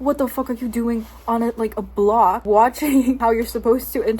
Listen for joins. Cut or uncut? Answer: cut